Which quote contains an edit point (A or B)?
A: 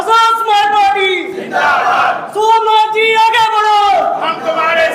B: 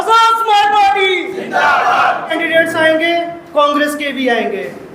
B